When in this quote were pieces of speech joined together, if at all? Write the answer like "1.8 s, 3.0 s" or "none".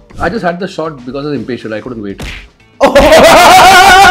none